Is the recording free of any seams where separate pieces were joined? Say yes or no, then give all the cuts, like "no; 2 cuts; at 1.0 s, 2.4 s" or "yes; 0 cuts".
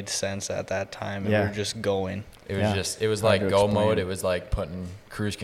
yes; 0 cuts